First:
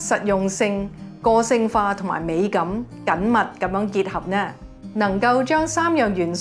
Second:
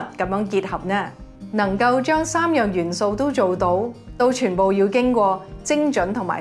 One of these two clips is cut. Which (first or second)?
second